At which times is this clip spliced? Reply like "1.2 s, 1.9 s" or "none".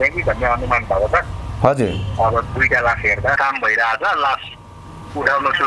3.4 s